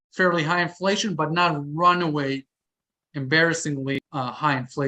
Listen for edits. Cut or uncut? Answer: cut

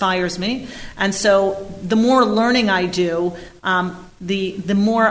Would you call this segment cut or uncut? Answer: uncut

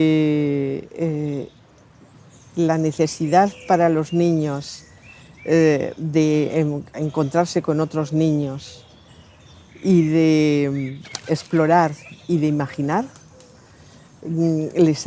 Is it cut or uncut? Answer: cut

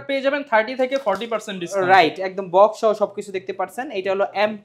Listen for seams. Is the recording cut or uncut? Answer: uncut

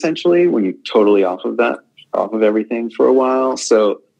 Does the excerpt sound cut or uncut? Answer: uncut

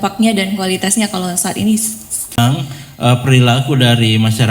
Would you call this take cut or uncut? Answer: cut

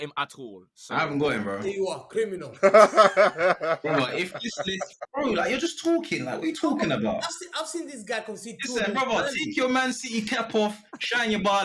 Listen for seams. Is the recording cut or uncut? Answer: cut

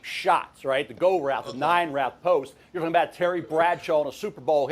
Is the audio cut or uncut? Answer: cut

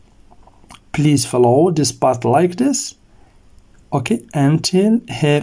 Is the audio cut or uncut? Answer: uncut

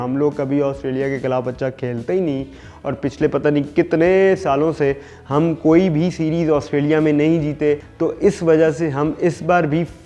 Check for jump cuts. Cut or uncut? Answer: cut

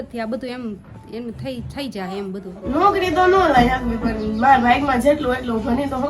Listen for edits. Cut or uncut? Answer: cut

